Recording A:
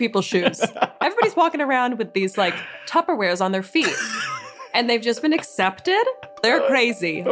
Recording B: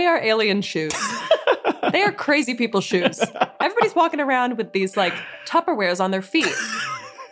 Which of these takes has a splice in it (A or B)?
A